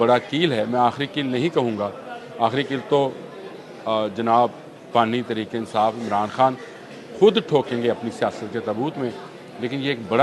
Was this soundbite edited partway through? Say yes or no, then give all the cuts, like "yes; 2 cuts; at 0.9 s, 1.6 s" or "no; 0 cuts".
no; 0 cuts